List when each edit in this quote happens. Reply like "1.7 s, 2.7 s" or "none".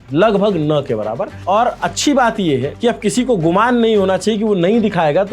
1.4 s, 2.7 s